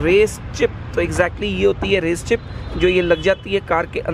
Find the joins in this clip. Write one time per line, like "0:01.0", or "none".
none